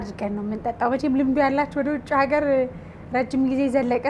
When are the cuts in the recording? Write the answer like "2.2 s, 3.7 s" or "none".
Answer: none